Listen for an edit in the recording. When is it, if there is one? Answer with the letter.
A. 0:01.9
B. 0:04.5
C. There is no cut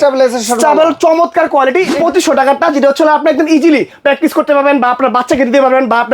A